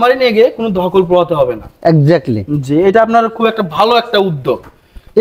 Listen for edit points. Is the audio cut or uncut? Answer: uncut